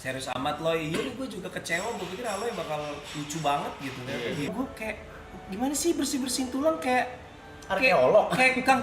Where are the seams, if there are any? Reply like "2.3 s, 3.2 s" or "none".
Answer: 4.5 s